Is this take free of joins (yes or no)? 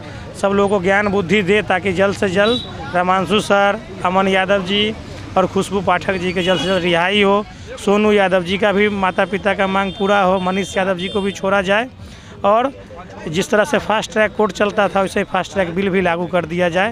yes